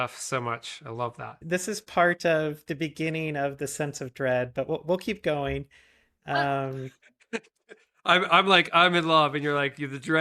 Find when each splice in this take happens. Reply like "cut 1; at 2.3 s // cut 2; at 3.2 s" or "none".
cut 1; at 1.2 s